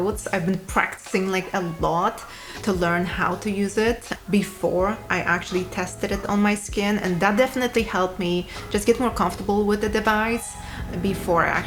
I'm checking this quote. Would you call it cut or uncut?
uncut